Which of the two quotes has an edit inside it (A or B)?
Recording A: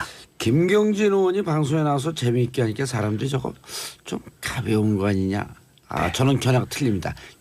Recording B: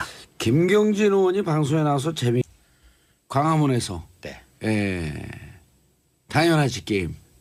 A